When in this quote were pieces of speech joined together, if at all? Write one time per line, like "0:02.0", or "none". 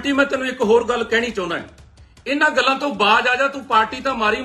none

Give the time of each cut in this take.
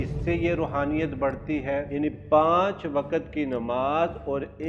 0:01.9

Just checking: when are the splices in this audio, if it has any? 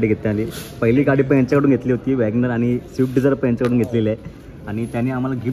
none

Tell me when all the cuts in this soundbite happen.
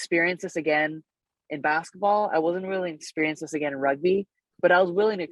none

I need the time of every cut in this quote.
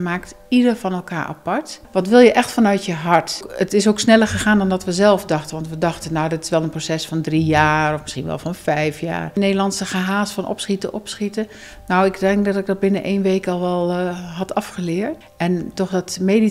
0:01.8
0:03.4
0:09.3
0:15.2

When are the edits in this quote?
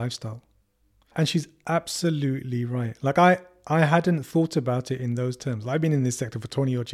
0:01.1

